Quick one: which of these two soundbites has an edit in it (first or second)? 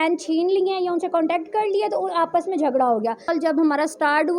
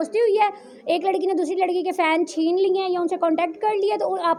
first